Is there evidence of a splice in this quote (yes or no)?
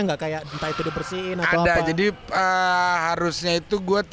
no